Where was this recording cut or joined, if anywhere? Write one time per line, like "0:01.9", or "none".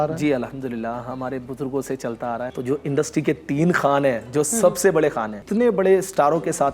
0:02.5
0:05.4